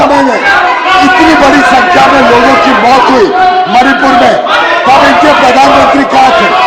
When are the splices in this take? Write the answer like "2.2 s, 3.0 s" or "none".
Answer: none